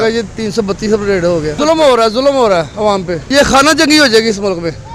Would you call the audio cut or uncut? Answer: uncut